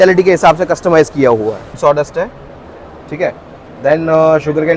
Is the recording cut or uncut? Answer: cut